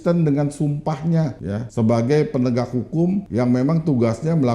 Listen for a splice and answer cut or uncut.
cut